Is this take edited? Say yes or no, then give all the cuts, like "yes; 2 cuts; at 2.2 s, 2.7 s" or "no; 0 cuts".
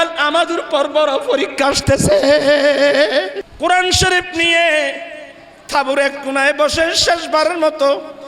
yes; 1 cut; at 3.4 s